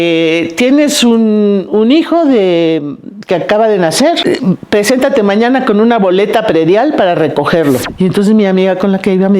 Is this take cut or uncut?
cut